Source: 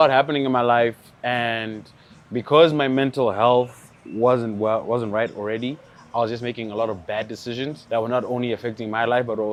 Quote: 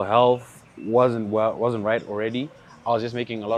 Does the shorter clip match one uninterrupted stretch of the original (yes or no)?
yes